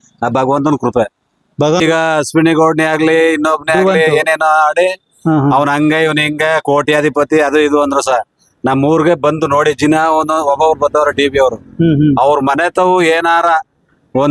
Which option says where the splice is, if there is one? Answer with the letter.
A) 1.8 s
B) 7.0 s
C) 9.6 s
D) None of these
A